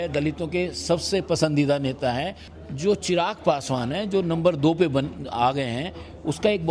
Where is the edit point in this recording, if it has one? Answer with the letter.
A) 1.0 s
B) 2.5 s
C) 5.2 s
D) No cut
B